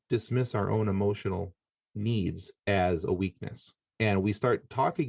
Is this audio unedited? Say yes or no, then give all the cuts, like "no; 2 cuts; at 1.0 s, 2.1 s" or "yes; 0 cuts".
no; 1 cut; at 2.5 s